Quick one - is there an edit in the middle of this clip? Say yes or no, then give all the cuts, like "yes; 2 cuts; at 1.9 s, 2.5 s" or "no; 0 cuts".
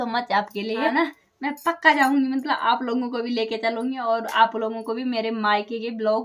yes; 1 cut; at 0.9 s